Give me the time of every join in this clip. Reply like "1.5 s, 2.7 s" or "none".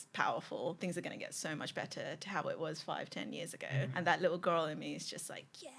0.8 s, 3.9 s